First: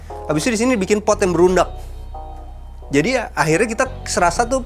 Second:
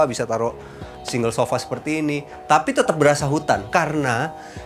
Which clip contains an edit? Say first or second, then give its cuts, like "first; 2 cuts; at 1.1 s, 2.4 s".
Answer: second; 1 cut; at 3.6 s